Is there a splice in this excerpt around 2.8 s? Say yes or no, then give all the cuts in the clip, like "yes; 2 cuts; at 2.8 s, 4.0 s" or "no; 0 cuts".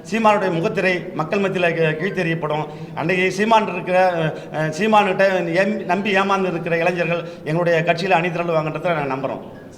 no; 0 cuts